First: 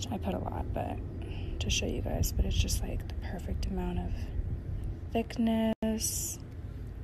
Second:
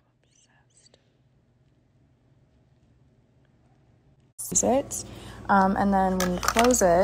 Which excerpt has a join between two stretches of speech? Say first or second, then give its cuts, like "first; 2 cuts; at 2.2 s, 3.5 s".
second; 1 cut; at 4.5 s